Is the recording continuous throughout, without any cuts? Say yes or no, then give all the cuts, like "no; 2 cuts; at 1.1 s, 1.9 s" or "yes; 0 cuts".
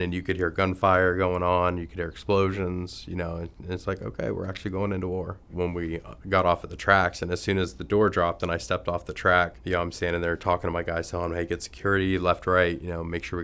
no; 2 cuts; at 5.5 s, 9.6 s